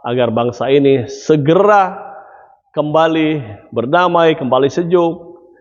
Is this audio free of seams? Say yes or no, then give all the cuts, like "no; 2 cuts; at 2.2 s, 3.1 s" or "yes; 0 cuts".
yes; 0 cuts